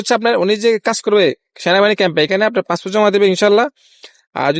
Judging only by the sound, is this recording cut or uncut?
uncut